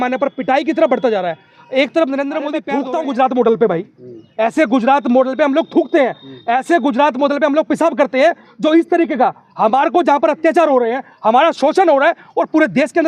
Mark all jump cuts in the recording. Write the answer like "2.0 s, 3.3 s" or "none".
2.7 s